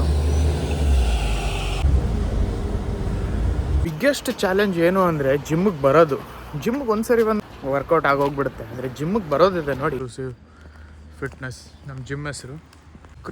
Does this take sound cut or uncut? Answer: cut